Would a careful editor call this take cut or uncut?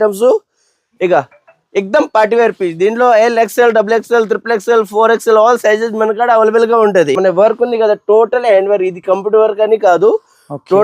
cut